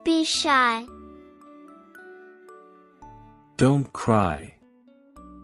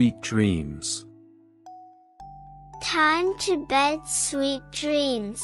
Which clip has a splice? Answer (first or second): first